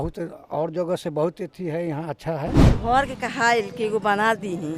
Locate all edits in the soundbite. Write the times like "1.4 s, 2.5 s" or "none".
2.7 s